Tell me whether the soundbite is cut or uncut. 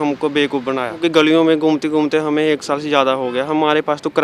cut